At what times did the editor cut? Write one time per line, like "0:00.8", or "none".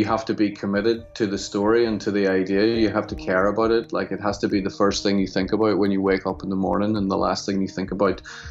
none